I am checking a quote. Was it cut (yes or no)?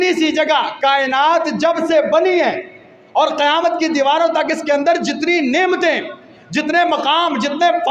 no